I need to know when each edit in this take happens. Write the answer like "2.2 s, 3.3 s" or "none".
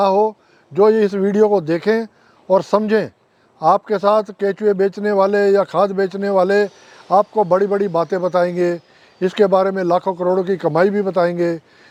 none